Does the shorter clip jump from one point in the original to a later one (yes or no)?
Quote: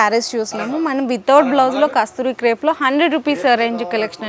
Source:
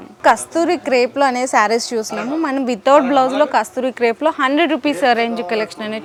no